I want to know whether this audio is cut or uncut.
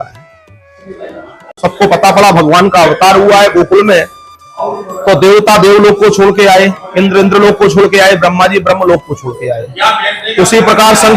cut